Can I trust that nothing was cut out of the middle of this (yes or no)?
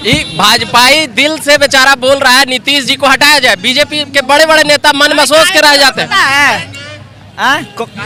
yes